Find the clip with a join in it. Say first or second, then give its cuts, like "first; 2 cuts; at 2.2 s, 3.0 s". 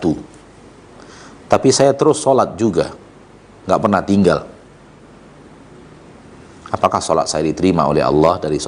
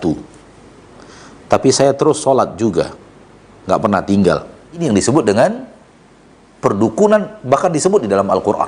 second; 1 cut; at 4.8 s